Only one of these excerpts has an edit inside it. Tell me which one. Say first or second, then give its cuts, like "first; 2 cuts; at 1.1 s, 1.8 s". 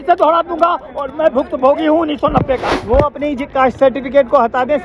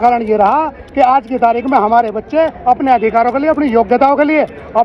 first; 1 cut; at 2.6 s